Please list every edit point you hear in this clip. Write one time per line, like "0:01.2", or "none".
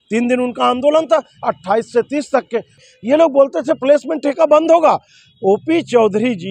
0:02.8

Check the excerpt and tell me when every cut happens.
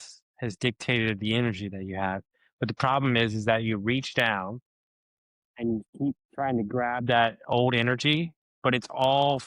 none

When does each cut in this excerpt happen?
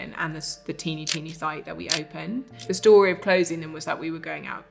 0:02.6

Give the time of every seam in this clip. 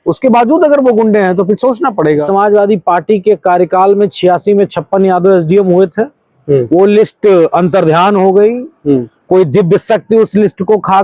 0:02.2

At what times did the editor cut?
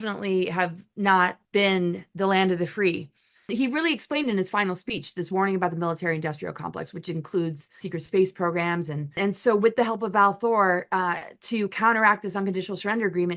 0:01.4
0:03.5
0:07.8
0:09.2

